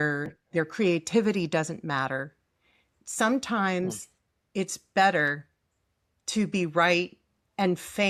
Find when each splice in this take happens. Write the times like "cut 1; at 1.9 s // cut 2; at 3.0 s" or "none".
none